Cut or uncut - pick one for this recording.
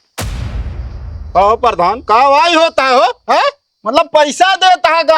cut